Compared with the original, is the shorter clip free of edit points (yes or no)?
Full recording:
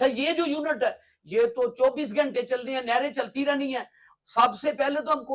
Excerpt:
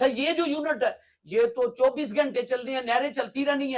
yes